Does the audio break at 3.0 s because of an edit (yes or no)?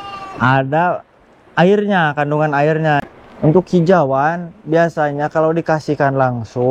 yes